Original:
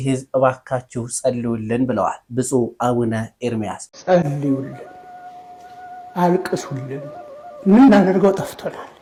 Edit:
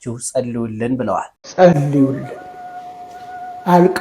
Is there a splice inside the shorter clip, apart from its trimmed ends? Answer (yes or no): yes